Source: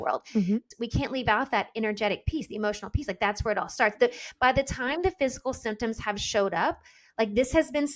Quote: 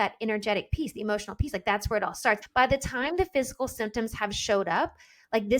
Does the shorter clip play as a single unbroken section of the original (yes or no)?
no